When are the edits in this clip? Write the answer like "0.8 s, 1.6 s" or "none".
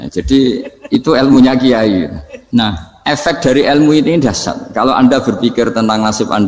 2.7 s